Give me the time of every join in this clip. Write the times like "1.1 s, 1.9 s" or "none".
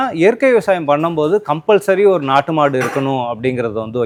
none